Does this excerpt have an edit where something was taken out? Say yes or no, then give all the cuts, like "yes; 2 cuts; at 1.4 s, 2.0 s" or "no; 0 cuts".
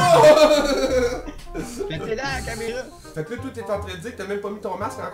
yes; 1 cut; at 2.7 s